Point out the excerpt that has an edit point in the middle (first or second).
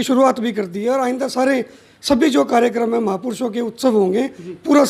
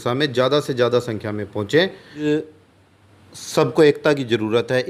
second